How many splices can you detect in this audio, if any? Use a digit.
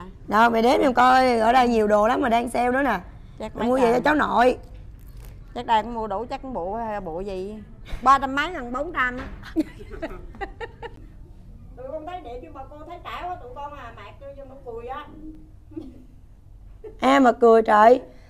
1